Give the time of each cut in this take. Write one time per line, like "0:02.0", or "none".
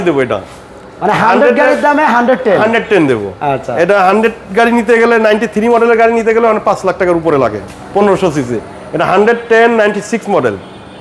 none